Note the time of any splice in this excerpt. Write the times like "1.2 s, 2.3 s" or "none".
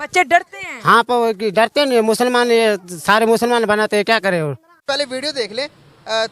4.8 s